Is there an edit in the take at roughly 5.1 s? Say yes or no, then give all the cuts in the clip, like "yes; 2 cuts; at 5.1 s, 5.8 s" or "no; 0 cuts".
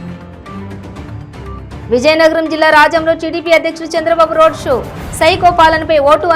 no; 1 cut; at 1.8 s